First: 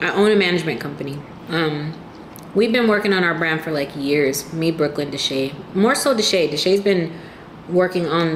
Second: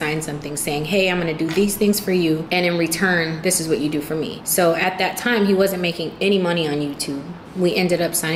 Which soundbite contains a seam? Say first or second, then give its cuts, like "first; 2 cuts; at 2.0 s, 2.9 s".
second; 4 cuts; at 1.4 s, 2.5 s, 4.4 s, 7.4 s